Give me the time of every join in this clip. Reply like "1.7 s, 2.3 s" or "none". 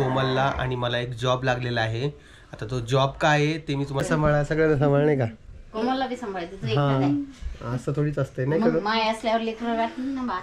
4.0 s